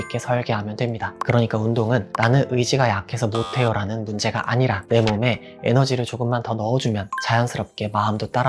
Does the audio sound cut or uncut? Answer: cut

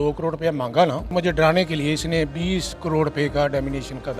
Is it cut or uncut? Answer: cut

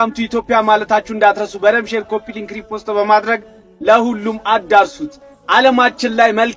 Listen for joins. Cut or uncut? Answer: uncut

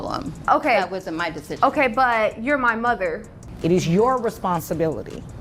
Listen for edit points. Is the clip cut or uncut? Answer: cut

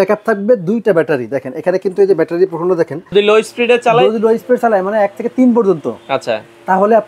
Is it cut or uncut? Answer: cut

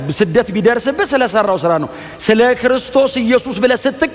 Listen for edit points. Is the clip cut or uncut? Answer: uncut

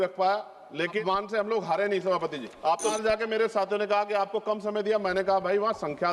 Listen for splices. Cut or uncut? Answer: cut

